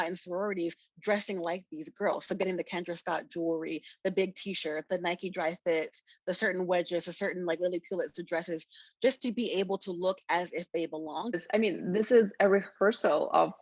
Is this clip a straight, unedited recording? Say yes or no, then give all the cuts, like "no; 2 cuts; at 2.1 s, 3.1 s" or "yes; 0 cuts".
no; 1 cut; at 11.4 s